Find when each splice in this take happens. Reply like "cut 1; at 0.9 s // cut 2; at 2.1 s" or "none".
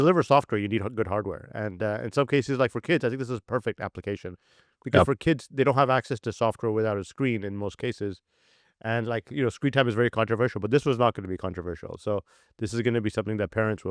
none